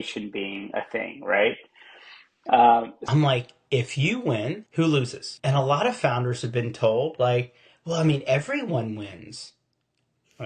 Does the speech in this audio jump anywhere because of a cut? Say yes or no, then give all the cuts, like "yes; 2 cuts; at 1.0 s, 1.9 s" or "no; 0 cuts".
yes; 3 cuts; at 3.0 s, 4.7 s, 5.2 s